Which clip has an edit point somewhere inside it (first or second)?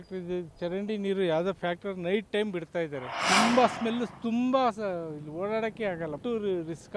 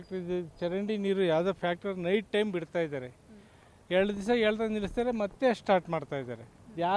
first